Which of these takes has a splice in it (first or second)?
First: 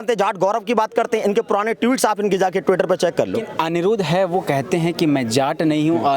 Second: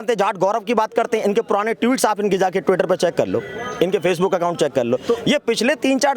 first